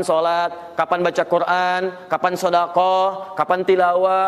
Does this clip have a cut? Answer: no; 0 cuts

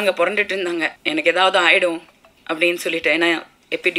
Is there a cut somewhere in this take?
yes; 1 cut; at 1.0 s

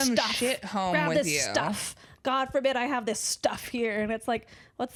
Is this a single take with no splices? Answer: yes; 0 cuts

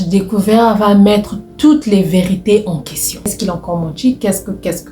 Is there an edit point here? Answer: yes; 1 cut; at 3.3 s

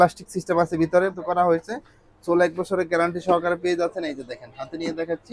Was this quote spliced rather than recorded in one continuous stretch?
yes; 1 cut; at 1.2 s

